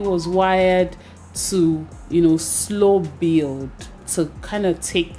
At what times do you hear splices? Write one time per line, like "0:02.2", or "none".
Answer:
none